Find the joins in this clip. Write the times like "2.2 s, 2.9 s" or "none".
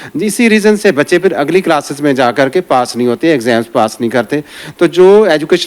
none